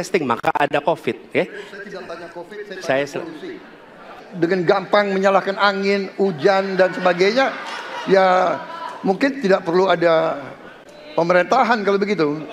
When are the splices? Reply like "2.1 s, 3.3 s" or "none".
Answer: 4.2 s